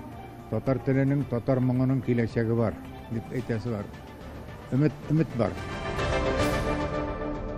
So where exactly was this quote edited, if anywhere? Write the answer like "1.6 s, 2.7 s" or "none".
5.7 s